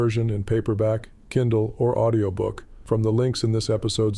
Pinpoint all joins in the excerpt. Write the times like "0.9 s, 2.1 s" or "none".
2.7 s